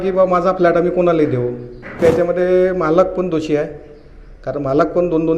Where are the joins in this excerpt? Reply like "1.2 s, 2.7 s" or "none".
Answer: 2.0 s